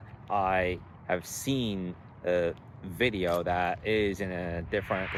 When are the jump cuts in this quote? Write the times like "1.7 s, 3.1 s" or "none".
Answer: none